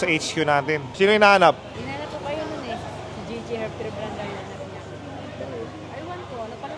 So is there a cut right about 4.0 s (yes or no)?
no